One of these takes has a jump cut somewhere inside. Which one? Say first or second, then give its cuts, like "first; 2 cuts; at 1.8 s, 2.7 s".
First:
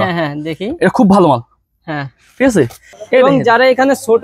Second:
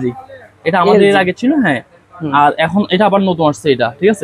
first; 1 cut; at 2.9 s